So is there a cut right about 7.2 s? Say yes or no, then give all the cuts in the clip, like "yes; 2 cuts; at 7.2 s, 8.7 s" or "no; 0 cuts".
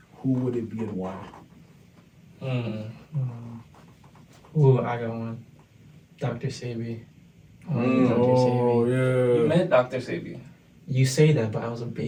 no; 0 cuts